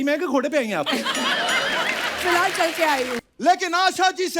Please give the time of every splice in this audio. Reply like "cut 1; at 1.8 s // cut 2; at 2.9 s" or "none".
cut 1; at 3.2 s

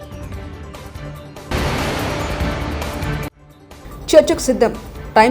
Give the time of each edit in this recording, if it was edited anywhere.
cut 1; at 1.5 s // cut 2; at 3.3 s

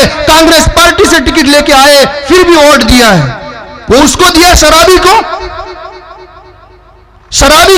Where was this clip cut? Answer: none

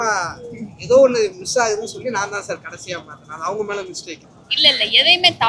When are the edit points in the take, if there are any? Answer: cut 1; at 4.4 s

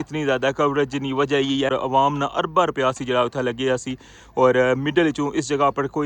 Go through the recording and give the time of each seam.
cut 1; at 1.7 s

